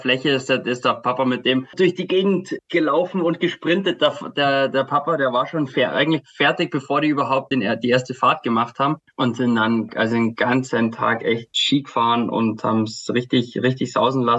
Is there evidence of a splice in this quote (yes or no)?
no